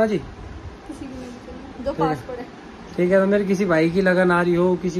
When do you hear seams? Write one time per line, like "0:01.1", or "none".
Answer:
none